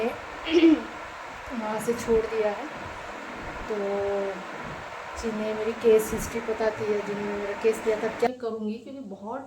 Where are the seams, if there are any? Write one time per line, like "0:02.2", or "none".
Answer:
0:08.3